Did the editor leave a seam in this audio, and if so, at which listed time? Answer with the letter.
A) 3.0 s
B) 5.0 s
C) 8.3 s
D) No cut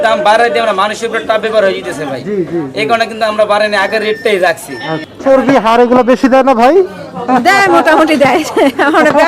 B